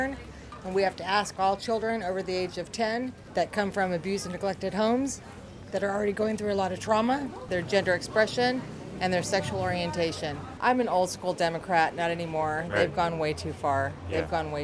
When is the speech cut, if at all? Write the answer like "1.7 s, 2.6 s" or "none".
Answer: 3.2 s, 7.5 s, 10.5 s